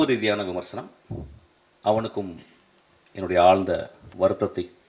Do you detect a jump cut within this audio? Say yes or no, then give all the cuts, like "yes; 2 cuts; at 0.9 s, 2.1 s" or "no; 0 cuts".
yes; 1 cut; at 4.0 s